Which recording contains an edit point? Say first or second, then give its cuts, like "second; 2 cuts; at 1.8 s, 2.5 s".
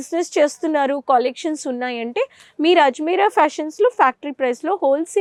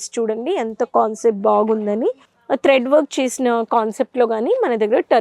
second; 1 cut; at 2.3 s